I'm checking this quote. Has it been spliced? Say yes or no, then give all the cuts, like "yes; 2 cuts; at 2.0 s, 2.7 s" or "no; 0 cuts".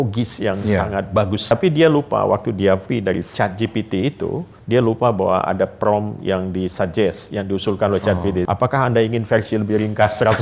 yes; 4 cuts; at 1.5 s, 2.8 s, 4.5 s, 8.5 s